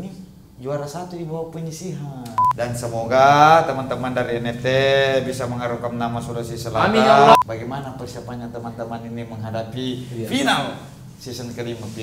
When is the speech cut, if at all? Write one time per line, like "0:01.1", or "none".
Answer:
0:02.4
0:07.3